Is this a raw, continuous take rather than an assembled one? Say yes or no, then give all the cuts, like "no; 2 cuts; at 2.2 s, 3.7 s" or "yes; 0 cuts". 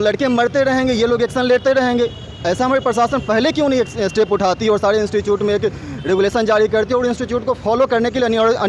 yes; 0 cuts